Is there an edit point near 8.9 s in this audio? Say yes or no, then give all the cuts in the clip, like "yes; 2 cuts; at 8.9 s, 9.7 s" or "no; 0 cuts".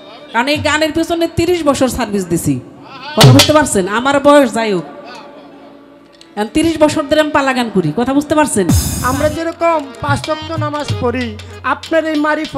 yes; 1 cut; at 8.9 s